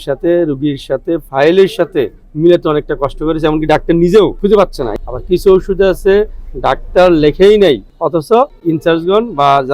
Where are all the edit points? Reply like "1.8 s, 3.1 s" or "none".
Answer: 4.5 s, 8.6 s